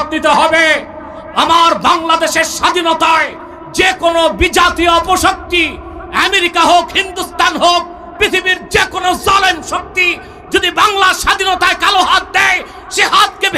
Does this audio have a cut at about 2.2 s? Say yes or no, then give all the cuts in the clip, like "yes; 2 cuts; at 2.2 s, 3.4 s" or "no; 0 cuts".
no; 0 cuts